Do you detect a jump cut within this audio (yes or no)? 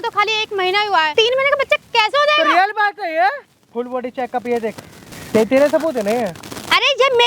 yes